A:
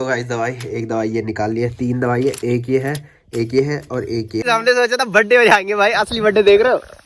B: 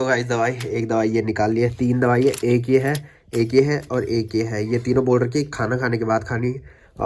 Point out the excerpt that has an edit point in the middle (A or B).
A